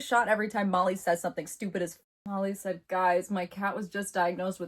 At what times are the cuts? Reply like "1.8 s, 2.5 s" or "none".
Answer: 2.1 s